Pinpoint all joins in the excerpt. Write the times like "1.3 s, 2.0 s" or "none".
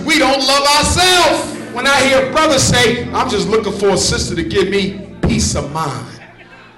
1.7 s